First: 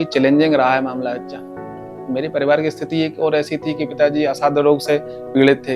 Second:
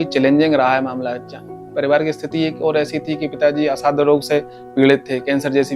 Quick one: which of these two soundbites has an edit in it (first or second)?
second